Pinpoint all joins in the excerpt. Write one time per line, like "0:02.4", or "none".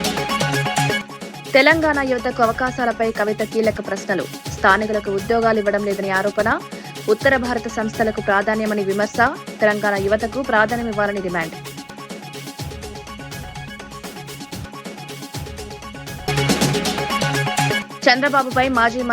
0:00.9